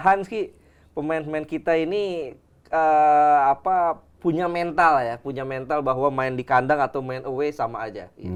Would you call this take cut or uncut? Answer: uncut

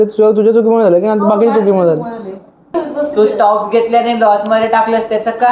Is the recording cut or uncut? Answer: cut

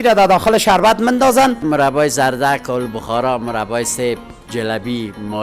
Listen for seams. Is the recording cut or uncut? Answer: cut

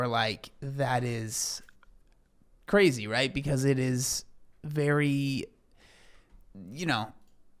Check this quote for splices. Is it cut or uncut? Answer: uncut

